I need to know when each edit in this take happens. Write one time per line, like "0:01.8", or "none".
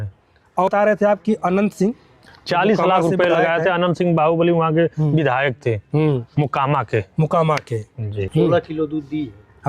0:00.7
0:08.2